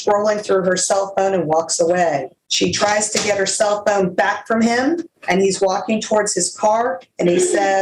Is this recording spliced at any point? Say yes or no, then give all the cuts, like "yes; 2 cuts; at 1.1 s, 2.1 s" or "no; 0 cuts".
yes; 2 cuts; at 2.4 s, 5.1 s